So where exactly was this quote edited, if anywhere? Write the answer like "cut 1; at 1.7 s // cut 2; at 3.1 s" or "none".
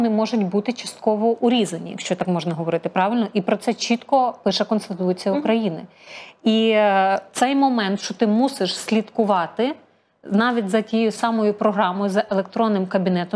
none